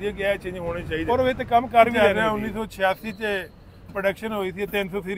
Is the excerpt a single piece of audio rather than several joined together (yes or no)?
no